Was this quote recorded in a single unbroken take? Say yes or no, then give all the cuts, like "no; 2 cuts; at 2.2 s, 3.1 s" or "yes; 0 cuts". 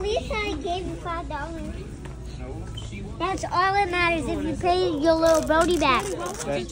yes; 0 cuts